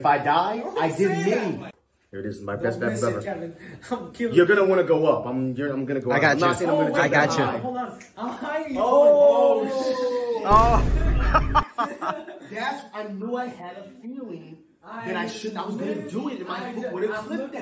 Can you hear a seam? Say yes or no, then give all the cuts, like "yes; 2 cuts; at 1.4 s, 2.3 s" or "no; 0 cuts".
yes; 1 cut; at 1.7 s